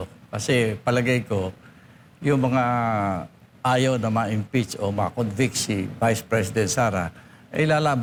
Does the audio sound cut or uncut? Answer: uncut